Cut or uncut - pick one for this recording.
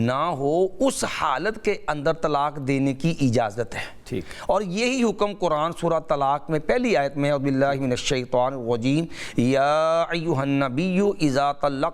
uncut